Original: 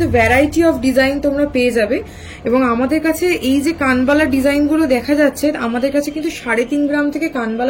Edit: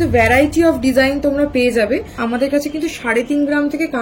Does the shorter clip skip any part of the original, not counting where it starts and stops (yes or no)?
yes